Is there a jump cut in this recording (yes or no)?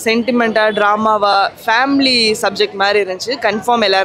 no